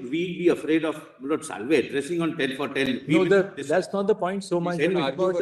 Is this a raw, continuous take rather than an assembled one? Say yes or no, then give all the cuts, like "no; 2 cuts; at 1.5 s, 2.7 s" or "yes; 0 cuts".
yes; 0 cuts